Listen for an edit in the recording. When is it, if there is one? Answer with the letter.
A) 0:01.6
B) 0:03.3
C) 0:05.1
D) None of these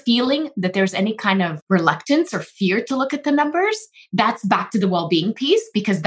A